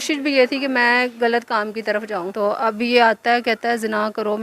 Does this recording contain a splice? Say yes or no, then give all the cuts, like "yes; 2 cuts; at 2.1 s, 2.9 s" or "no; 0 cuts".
yes; 1 cut; at 2.3 s